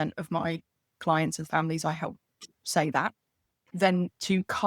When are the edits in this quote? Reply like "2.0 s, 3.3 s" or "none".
3.6 s